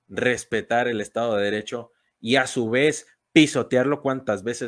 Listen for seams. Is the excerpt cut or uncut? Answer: uncut